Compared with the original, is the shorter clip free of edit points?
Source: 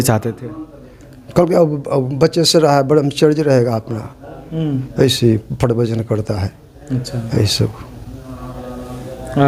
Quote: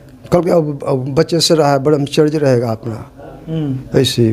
yes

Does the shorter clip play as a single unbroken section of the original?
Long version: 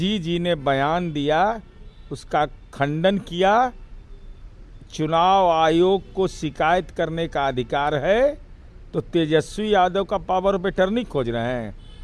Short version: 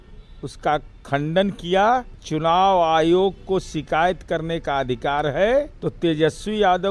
no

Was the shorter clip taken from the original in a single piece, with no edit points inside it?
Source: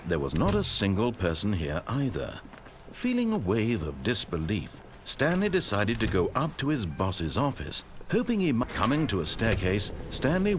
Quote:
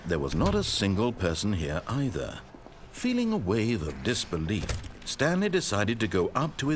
yes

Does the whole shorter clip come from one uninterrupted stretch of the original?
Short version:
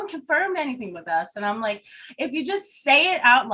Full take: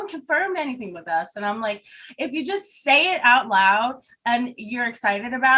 yes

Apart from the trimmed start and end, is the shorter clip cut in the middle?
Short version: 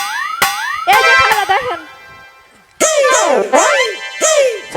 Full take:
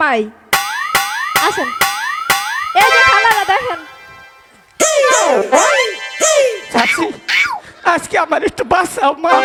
yes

